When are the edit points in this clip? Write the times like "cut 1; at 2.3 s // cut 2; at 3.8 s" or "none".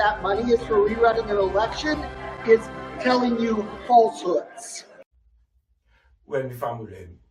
none